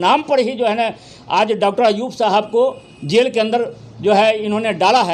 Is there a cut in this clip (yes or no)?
no